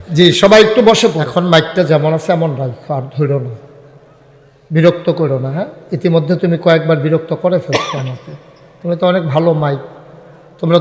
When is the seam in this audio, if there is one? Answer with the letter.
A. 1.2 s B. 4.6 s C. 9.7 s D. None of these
A